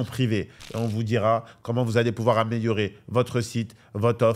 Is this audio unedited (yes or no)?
yes